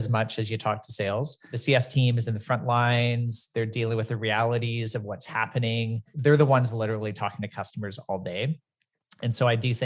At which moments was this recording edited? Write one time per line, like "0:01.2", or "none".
0:01.5
0:06.1